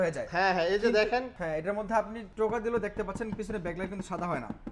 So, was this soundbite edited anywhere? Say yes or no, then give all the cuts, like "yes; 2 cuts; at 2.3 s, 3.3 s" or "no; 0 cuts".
yes; 2 cuts; at 1.3 s, 2.2 s